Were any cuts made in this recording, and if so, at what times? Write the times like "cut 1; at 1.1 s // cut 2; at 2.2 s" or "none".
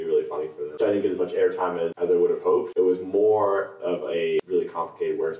cut 1; at 0.8 s // cut 2; at 1.9 s // cut 3; at 2.7 s // cut 4; at 4.4 s